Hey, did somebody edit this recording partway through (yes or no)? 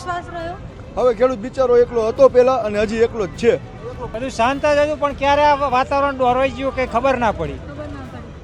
yes